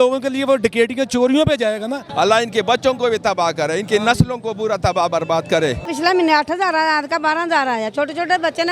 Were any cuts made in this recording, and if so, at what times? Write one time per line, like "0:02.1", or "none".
0:02.0
0:05.8